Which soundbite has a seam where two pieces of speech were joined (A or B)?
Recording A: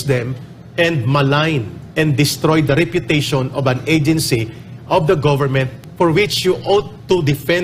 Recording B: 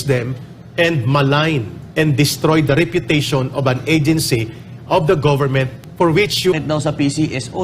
B